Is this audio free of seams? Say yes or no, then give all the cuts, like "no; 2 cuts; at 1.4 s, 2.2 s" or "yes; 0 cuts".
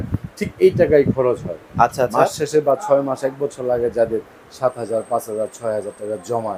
yes; 0 cuts